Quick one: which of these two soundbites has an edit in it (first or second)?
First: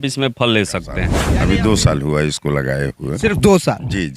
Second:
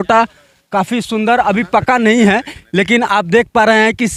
first